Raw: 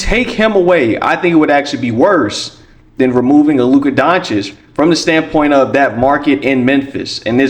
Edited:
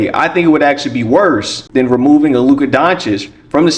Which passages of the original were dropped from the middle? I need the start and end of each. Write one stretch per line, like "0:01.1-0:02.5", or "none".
0:02.4-0:02.8

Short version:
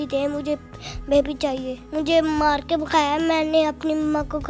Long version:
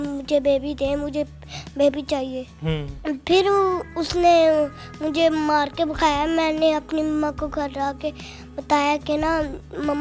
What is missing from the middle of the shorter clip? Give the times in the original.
0:02.5-0:04.9

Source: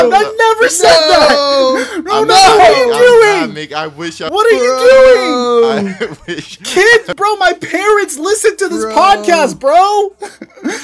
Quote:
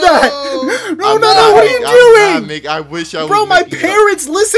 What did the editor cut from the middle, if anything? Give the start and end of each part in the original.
0:04.3-0:07.1

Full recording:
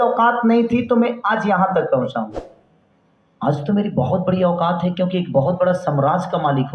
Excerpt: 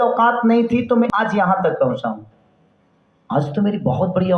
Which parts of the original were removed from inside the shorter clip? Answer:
0:01.1-0:01.2

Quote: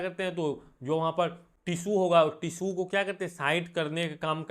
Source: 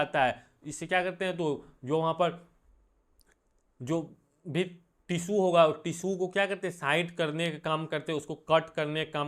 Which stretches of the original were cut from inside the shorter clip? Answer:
0:02.5-0:04.9

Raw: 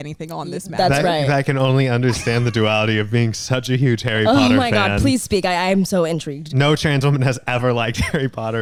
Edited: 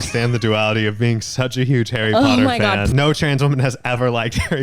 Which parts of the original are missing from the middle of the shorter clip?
0:05.0-0:06.5

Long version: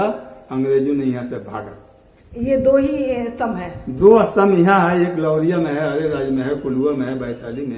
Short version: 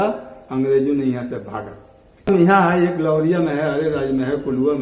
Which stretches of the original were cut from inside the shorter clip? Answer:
0:02.3-0:04.5

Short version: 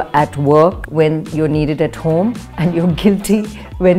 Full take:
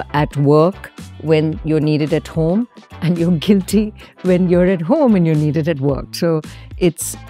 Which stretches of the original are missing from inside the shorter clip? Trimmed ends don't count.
0:00.8-0:01.2
0:02.8-0:02.9

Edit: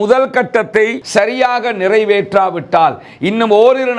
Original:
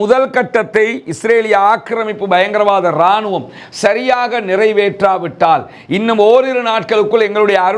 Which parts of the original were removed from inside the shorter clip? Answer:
0:01.0-0:03.7

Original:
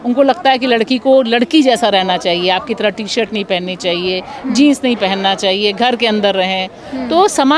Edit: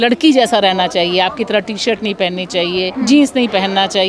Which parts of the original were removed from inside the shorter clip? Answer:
0:04.2-0:04.4

